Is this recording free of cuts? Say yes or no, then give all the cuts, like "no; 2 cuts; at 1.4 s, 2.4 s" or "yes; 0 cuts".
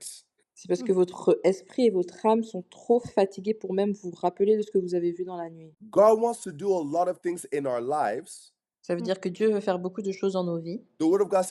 no; 1 cut; at 5.6 s